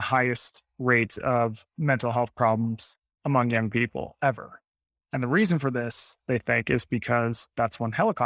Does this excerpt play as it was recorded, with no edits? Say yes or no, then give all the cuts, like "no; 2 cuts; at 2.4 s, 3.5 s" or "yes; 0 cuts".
yes; 0 cuts